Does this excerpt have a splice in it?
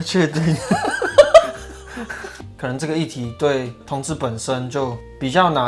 yes; 1 cut; at 2.3 s

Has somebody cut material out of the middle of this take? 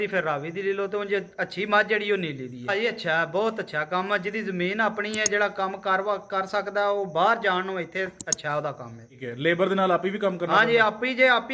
yes; 2 cuts; at 2.7 s, 9.2 s

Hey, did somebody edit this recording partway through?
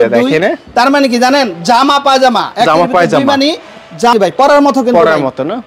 yes; 1 cut; at 4.1 s

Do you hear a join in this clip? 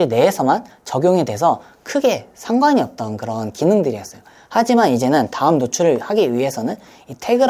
no; 0 cuts

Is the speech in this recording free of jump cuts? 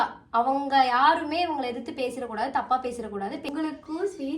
no; 1 cut; at 3.5 s

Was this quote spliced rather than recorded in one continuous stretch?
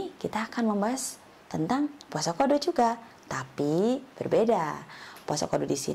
no; 0 cuts

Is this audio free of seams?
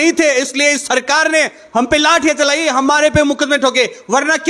yes; 0 cuts

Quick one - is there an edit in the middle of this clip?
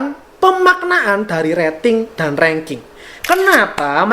yes; 1 cut; at 3.1 s

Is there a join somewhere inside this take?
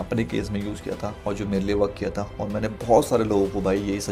no; 0 cuts

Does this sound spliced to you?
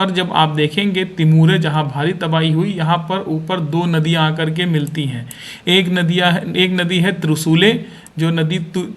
no; 0 cuts

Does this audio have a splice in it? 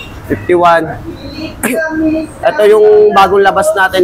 no; 0 cuts

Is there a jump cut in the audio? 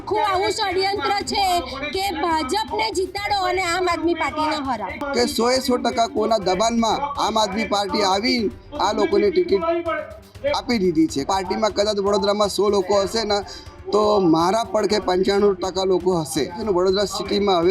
yes; 3 cuts; at 5.0 s, 11.2 s, 16.6 s

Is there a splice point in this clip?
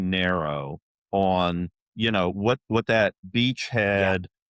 yes; 1 cut; at 3.2 s

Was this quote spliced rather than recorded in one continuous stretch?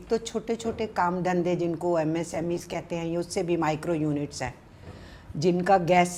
no; 0 cuts

